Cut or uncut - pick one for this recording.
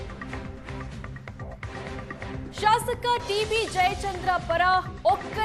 cut